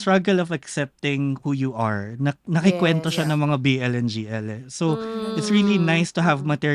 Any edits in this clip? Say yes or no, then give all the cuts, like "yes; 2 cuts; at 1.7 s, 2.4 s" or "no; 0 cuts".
no; 0 cuts